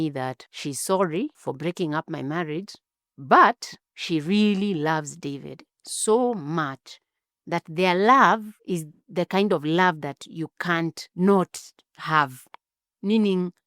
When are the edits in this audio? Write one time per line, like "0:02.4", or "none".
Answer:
none